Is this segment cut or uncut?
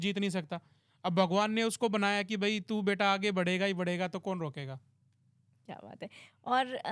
uncut